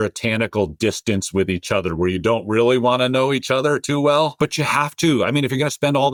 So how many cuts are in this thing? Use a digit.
0